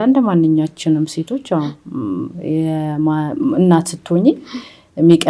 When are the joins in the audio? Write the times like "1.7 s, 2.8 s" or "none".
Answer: none

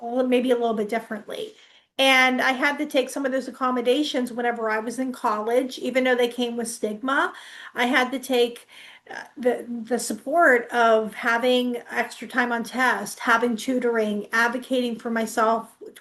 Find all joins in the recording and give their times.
none

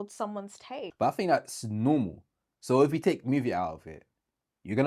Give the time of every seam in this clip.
0.9 s

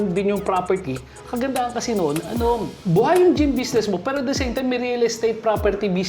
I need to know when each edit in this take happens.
2.7 s

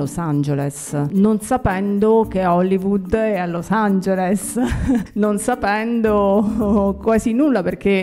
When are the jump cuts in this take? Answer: 1.1 s, 5.1 s

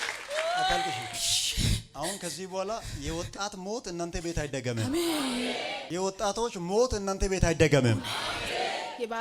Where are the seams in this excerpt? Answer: 1.1 s

